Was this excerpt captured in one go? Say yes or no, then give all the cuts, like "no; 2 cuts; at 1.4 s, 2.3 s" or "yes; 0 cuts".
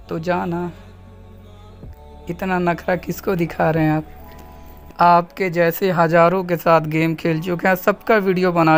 yes; 0 cuts